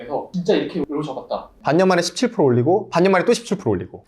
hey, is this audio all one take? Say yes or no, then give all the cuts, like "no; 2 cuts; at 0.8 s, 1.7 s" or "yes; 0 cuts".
no; 1 cut; at 1.5 s